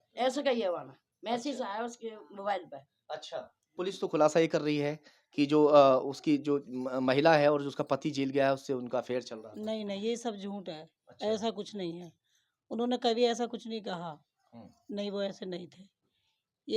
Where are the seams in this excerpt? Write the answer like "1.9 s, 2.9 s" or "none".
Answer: 3.7 s